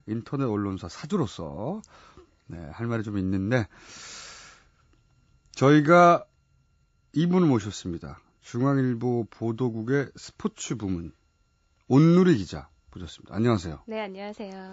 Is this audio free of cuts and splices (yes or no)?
no